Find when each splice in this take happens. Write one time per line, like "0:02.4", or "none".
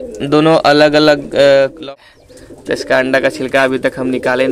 0:01.8